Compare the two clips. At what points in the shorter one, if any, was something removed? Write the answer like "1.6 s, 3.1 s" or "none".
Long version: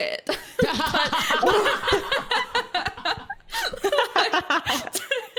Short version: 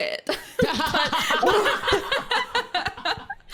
none